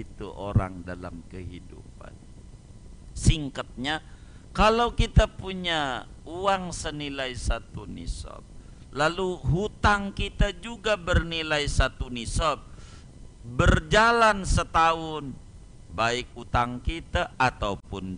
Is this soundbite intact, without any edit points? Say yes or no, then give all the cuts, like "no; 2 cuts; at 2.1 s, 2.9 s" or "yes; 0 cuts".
yes; 0 cuts